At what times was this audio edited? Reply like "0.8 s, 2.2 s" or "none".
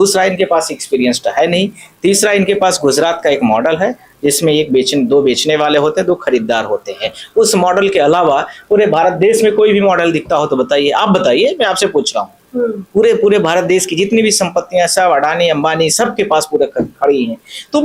none